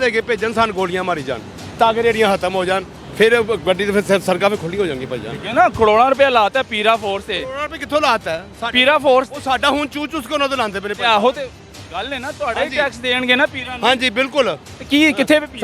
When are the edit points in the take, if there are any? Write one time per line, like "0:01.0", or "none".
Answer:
0:03.0
0:14.7